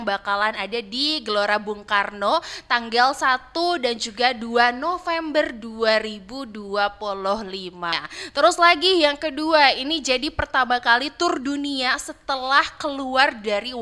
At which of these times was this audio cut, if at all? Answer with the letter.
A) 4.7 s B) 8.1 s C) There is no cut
B